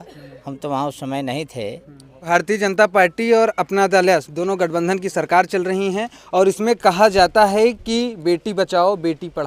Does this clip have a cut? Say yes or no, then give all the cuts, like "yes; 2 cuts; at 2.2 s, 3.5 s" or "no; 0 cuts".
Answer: yes; 1 cut; at 2.2 s